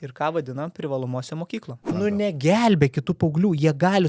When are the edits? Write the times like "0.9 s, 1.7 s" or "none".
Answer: 1.8 s